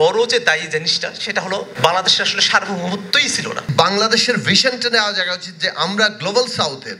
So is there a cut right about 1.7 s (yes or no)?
no